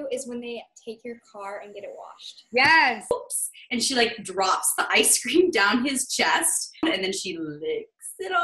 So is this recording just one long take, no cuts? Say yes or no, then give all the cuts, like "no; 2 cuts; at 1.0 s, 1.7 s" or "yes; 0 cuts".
no; 2 cuts; at 3.1 s, 6.8 s